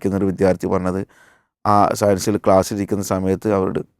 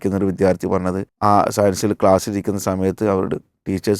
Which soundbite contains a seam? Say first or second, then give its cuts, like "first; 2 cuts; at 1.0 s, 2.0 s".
second; 1 cut; at 1.1 s